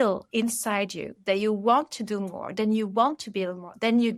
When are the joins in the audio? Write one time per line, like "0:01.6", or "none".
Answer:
none